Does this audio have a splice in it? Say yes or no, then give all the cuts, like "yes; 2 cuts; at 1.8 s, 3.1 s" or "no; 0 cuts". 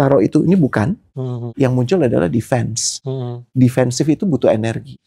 no; 0 cuts